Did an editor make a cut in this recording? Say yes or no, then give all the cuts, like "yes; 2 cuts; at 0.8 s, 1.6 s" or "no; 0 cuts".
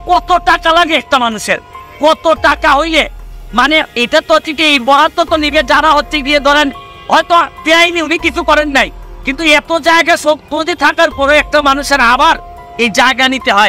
no; 0 cuts